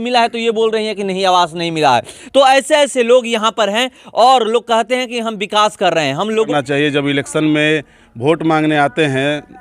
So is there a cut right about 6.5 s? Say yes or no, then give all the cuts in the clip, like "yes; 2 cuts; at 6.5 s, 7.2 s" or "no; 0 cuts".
yes; 1 cut; at 6.5 s